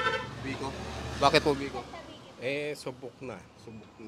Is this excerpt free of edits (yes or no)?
yes